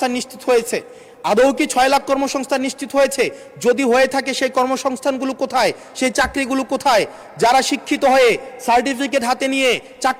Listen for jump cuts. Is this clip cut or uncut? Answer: uncut